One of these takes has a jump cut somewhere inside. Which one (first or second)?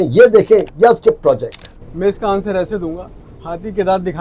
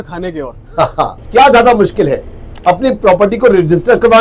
second